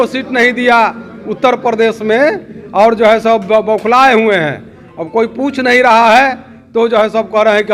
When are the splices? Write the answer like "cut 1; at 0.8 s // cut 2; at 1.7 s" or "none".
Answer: none